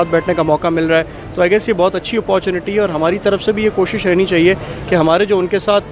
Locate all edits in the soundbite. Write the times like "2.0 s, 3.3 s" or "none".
none